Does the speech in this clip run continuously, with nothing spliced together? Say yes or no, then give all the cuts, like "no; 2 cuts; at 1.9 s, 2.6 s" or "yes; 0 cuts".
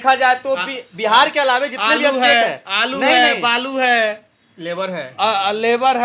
yes; 0 cuts